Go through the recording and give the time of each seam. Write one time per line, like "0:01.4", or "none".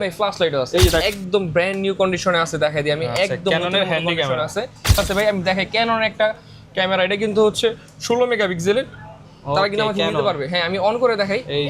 0:01.0
0:04.9